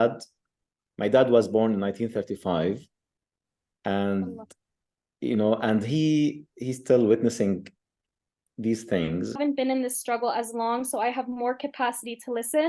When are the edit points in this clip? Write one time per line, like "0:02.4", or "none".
0:09.4